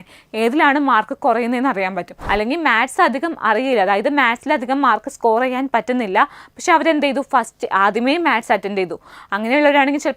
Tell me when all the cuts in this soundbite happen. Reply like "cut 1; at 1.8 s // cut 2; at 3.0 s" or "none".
cut 1; at 2.1 s